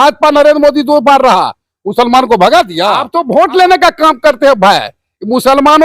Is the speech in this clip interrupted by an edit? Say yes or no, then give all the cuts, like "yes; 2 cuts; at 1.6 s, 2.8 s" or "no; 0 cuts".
yes; 1 cut; at 3.1 s